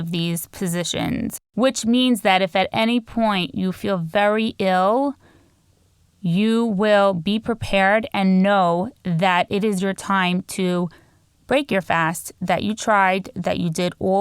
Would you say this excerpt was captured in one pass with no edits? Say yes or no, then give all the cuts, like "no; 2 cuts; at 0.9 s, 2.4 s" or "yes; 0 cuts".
no; 1 cut; at 1.4 s